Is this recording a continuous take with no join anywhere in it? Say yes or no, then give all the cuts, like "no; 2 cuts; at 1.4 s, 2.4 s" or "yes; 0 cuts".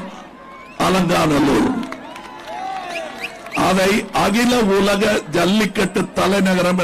yes; 0 cuts